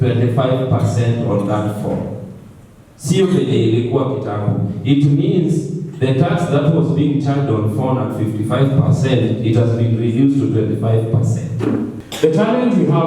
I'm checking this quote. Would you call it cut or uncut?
cut